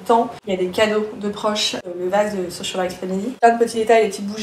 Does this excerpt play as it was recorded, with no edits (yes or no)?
no